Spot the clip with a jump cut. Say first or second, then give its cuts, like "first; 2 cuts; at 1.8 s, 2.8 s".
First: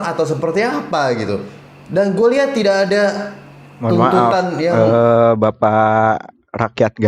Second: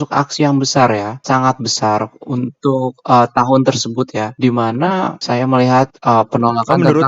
second; 3 cuts; at 1.2 s, 4.3 s, 5.2 s